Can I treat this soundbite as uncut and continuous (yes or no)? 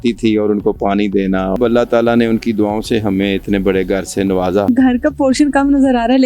no